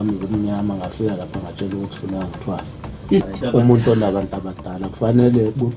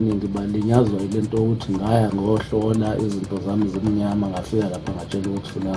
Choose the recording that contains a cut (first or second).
first